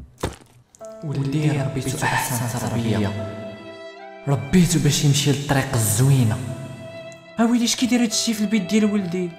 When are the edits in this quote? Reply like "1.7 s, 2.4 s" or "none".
none